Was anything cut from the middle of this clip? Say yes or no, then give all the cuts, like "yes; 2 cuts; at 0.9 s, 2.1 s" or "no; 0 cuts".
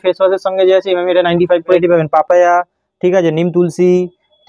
yes; 1 cut; at 1.8 s